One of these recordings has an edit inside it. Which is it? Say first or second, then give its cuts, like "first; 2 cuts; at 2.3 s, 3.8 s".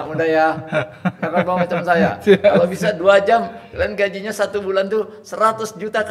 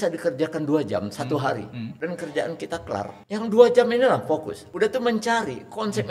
second; 3 cuts; at 1.9 s, 3.2 s, 4.6 s